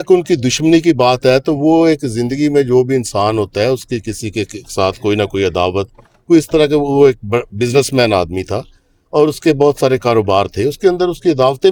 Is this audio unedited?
yes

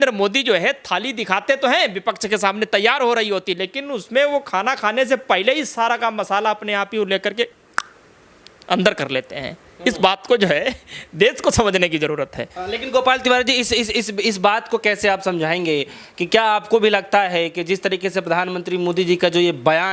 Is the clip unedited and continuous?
yes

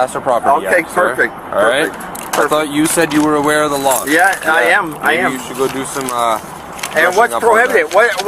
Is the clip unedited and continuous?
yes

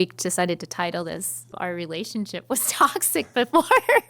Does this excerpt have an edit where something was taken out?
yes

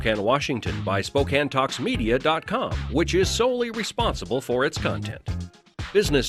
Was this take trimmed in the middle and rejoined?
no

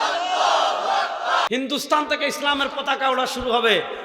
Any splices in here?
yes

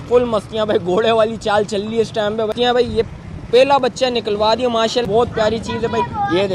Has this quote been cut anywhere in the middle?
yes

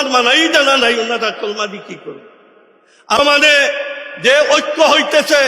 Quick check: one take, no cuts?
no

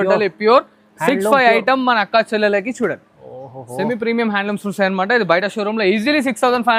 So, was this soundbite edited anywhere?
no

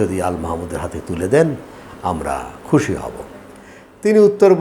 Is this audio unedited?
yes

